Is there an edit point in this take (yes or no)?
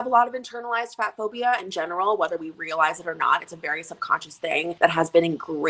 yes